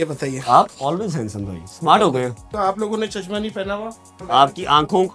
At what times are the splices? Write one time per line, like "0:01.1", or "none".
0:02.5
0:04.3